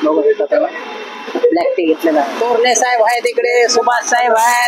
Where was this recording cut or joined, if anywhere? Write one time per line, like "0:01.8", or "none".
0:02.3

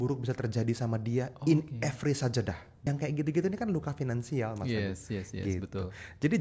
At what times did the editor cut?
0:02.9

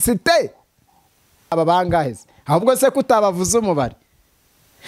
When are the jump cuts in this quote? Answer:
0:01.5

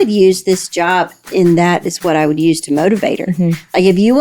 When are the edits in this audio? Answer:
0:01.2

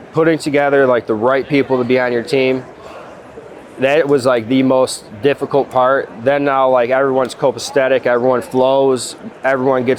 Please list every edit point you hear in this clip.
none

